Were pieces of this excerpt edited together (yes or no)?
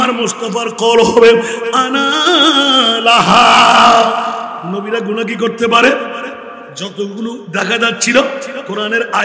yes